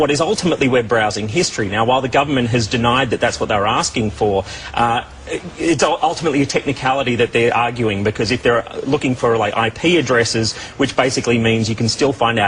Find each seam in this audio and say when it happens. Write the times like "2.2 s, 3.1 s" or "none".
9.5 s